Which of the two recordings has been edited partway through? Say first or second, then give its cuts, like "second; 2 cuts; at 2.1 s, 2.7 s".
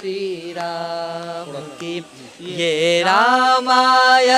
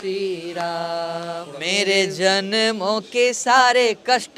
second; 1 cut; at 1.5 s